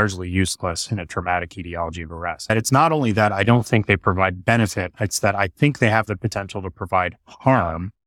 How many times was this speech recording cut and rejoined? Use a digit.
1